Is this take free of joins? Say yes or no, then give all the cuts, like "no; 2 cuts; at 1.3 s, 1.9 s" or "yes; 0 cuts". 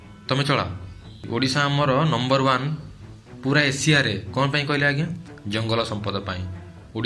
no; 1 cut; at 1.2 s